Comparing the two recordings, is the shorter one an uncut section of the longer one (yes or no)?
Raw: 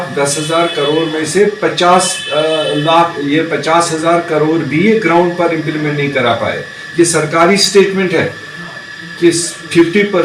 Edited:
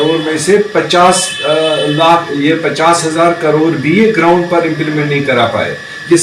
yes